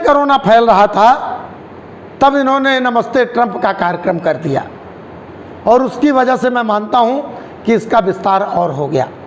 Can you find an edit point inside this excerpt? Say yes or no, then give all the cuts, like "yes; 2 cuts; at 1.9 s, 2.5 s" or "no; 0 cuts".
no; 0 cuts